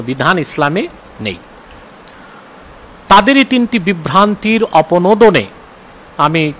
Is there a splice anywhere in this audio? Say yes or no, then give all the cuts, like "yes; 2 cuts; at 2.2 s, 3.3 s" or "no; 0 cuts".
no; 0 cuts